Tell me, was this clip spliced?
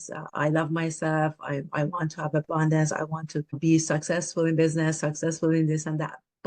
no; 0 cuts

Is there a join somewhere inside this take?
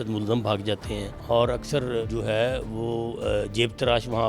yes; 2 cuts; at 1.1 s, 2.0 s

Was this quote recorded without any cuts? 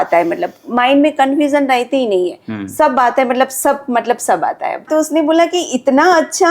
no; 1 cut; at 4.9 s

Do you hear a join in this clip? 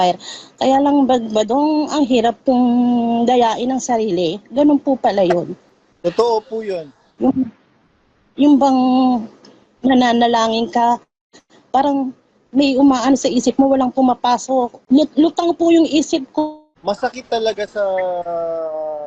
yes; 2 cuts; at 14.8 s, 16.7 s

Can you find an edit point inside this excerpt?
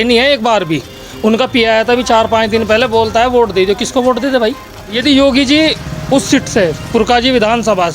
yes; 1 cut; at 4.9 s

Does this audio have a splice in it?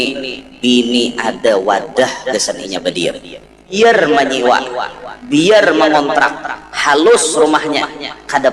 yes; 1 cut; at 3.8 s

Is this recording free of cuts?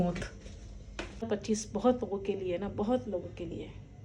no; 1 cut; at 1.3 s

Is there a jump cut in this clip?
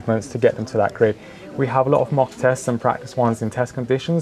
no; 0 cuts

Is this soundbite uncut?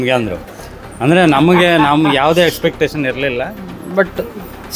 yes; 0 cuts

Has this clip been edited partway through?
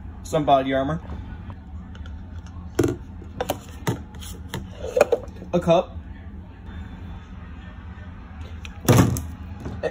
yes; 2 cuts; at 1.4 s, 7.1 s

